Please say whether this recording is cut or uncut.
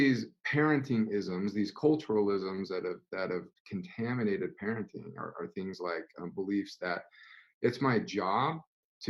uncut